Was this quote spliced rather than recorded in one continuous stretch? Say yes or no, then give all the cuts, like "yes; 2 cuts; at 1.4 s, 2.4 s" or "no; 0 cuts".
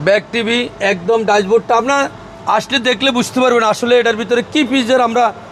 no; 0 cuts